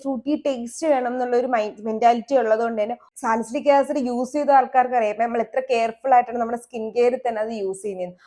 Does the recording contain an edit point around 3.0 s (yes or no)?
yes